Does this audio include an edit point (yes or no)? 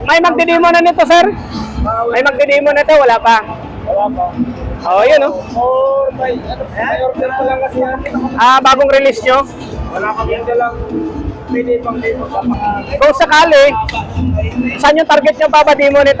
yes